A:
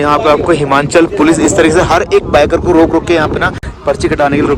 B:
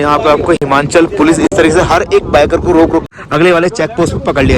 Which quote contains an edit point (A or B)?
B